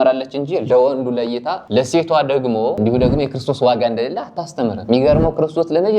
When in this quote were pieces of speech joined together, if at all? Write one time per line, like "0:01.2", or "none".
0:01.5
0:04.8